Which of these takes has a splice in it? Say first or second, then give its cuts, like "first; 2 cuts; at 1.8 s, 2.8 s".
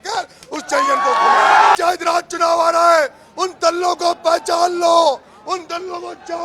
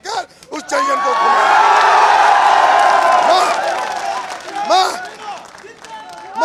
first; 1 cut; at 1.7 s